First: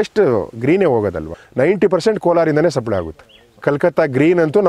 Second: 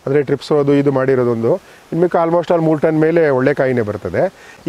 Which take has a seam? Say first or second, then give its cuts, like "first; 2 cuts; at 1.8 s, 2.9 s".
first; 2 cuts; at 1.4 s, 3.6 s